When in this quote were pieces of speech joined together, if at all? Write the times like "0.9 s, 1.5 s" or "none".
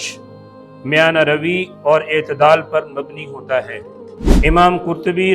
4.2 s